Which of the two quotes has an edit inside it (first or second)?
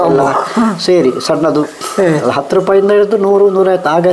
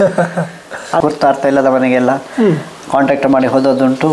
second